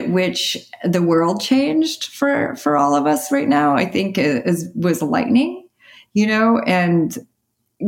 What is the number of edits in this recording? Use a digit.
0